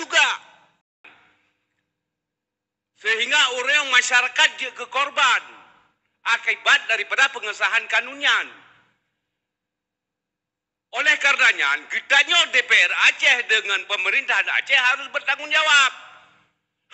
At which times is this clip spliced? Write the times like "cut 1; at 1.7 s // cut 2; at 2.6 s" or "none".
cut 1; at 1.0 s